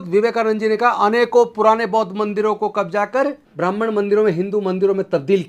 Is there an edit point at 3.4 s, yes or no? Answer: yes